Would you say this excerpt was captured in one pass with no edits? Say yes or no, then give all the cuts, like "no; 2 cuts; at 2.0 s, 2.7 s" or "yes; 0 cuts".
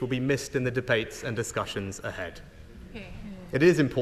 yes; 0 cuts